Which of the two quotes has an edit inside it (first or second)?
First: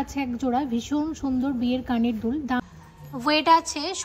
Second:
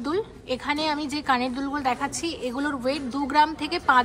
first